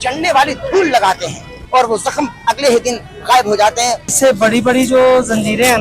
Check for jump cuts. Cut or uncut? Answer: cut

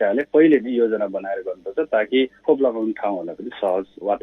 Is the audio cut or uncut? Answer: cut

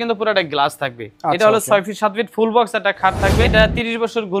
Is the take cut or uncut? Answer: cut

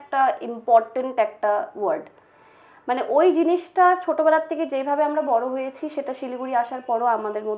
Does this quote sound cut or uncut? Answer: uncut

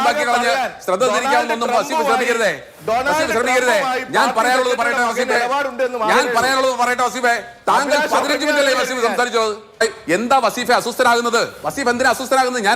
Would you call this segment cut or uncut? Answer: cut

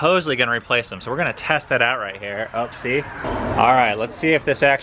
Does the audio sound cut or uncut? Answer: cut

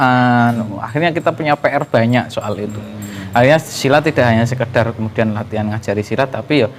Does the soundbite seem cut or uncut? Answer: uncut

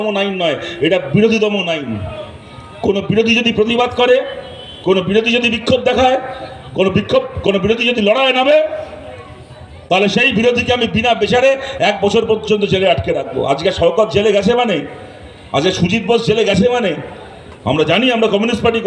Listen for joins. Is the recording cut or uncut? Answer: uncut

